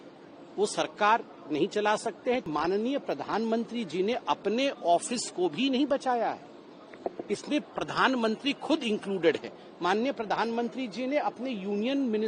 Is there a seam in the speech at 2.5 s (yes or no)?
yes